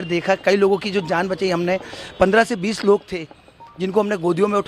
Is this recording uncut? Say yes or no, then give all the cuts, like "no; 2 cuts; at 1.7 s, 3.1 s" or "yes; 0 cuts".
yes; 0 cuts